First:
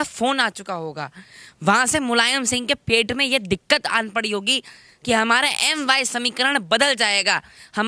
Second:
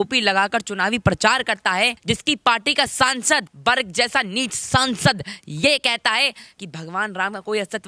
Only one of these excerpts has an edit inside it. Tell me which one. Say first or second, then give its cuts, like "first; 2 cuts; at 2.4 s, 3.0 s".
second; 2 cuts; at 2.0 s, 3.5 s